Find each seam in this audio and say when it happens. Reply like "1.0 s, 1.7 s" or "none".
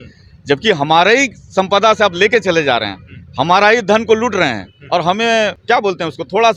5.6 s